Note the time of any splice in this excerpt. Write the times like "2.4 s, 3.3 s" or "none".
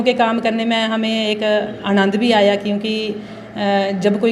none